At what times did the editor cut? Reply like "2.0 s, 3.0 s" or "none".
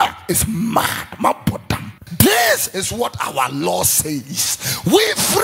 2.0 s